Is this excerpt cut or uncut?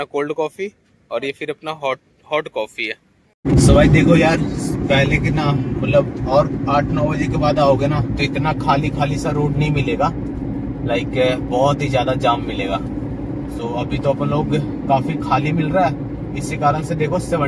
cut